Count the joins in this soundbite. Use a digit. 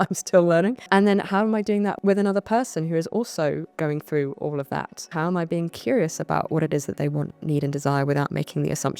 4